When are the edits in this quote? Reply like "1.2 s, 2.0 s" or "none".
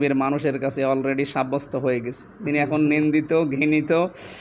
none